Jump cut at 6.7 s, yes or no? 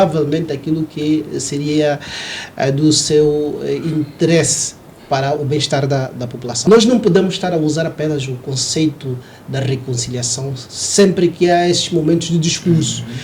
yes